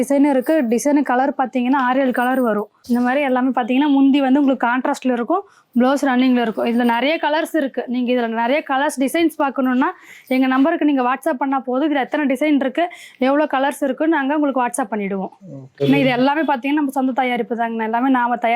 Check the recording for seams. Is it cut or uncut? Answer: cut